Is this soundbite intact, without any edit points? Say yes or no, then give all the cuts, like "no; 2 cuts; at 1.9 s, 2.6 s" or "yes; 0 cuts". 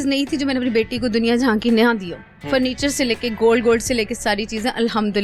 yes; 0 cuts